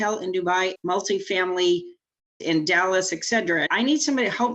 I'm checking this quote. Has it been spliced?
yes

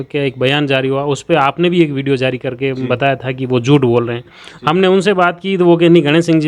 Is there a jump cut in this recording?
no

